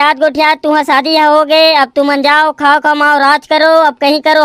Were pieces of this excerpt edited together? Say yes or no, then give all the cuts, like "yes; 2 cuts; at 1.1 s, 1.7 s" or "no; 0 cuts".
no; 0 cuts